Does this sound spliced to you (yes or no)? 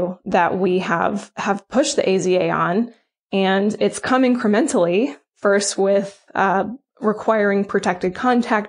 no